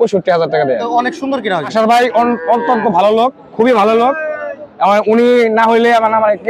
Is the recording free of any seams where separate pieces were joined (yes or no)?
no